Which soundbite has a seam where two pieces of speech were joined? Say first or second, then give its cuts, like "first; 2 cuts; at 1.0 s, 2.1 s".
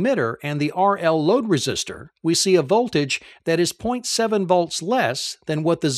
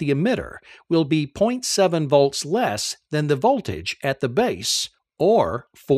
second; 1 cut; at 2.8 s